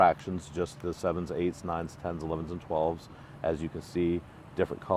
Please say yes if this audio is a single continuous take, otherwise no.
yes